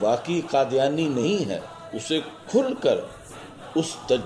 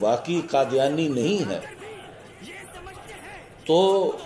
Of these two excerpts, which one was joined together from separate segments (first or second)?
first